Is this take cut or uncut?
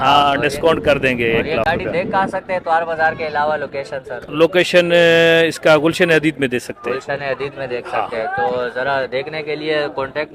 uncut